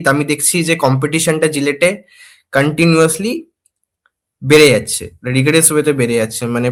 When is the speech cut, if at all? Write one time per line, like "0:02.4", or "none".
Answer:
none